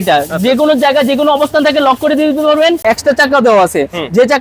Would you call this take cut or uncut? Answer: cut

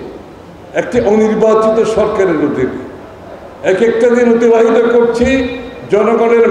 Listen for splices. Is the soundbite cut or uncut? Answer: uncut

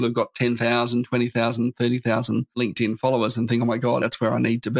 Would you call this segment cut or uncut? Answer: cut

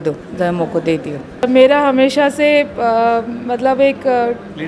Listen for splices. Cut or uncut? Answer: cut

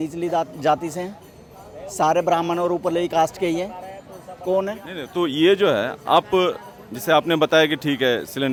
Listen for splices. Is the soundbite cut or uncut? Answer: uncut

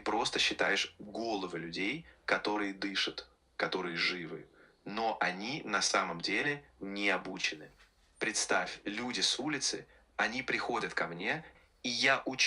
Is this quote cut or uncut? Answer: cut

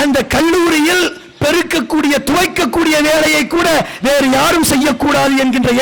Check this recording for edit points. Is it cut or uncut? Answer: uncut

